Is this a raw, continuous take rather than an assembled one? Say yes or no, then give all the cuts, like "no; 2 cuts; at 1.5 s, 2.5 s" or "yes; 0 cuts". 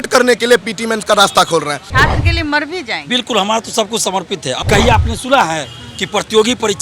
no; 2 cuts; at 1.8 s, 4.6 s